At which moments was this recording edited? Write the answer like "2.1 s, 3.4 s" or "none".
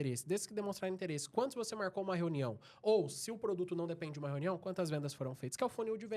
none